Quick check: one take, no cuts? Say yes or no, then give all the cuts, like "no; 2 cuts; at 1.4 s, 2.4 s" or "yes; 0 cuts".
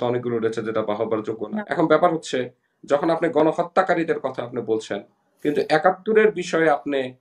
no; 1 cut; at 1.7 s